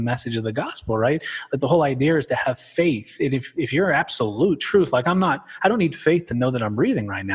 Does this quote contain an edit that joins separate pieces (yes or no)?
no